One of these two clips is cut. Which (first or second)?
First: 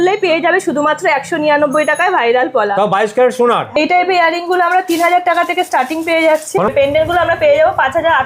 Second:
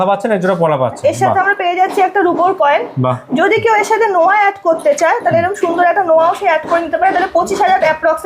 first